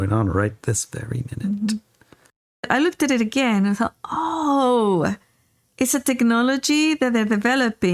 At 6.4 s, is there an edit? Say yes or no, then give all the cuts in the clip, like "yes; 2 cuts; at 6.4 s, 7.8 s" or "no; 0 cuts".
no; 1 cut; at 2.7 s